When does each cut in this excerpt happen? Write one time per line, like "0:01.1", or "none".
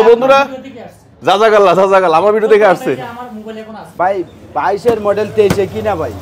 0:03.9